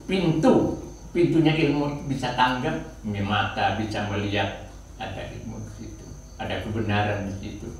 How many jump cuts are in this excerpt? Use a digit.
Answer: 0